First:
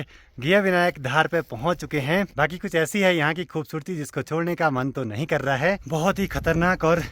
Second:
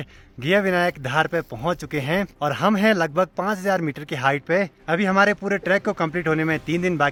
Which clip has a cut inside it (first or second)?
first